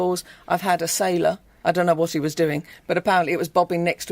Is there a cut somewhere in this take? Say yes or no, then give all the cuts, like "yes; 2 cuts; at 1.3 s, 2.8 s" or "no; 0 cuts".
yes; 1 cut; at 1.5 s